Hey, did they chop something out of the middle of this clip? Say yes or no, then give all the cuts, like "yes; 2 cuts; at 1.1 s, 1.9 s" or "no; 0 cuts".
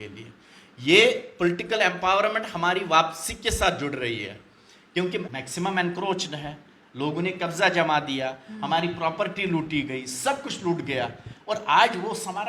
yes; 1 cut; at 5.2 s